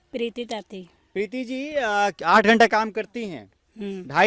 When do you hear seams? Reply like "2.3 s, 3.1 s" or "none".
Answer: none